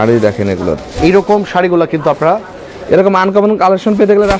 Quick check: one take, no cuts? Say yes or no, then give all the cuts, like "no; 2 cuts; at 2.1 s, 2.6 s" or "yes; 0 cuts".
yes; 0 cuts